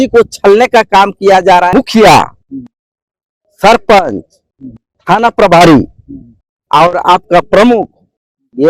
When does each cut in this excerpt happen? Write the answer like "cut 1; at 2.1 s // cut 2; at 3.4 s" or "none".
cut 1; at 1.7 s